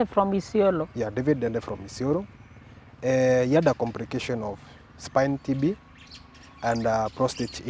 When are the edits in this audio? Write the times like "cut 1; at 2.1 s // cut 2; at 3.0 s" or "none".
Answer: cut 1; at 2.7 s